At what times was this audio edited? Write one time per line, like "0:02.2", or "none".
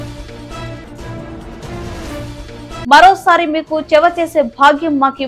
0:02.8

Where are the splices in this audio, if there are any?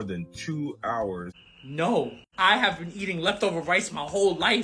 0:01.7

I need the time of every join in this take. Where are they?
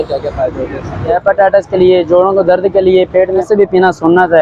0:01.2
0:03.4

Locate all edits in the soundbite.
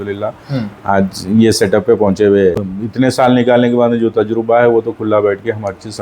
0:02.7

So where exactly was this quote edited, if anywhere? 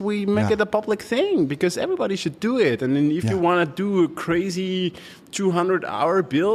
none

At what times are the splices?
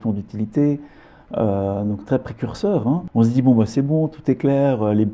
0:03.1

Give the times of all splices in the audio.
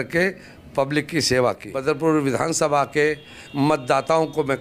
0:01.7

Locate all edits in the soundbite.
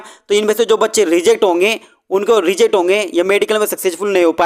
none

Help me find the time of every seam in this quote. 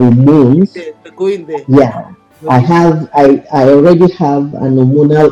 none

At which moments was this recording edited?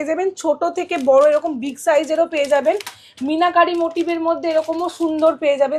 none

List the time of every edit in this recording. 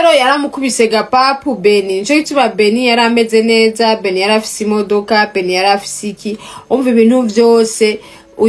none

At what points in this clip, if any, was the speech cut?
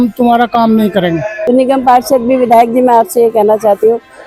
0:01.3

